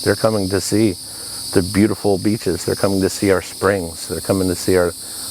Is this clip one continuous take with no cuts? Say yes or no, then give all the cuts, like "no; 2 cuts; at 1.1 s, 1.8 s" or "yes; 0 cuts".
yes; 0 cuts